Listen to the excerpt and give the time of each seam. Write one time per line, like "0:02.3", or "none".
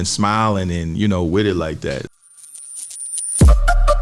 0:02.0